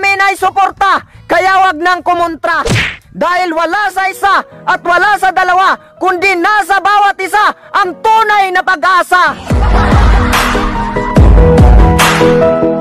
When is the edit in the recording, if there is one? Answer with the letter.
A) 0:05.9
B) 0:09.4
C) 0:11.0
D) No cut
B